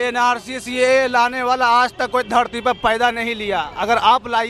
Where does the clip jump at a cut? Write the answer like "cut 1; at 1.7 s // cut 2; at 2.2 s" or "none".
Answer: none